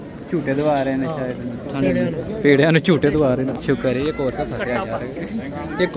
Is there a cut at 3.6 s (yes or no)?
yes